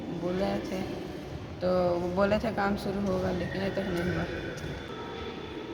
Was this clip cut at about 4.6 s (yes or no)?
no